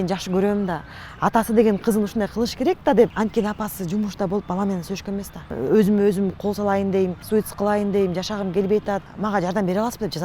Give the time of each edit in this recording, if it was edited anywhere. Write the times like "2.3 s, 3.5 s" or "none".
3.1 s, 5.5 s, 7.2 s, 9.1 s